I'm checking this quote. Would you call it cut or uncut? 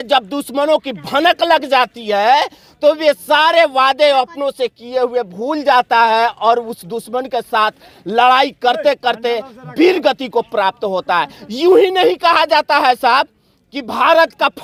uncut